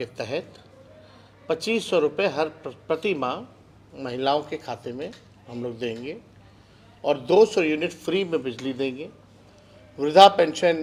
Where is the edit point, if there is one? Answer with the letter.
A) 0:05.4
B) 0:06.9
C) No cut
C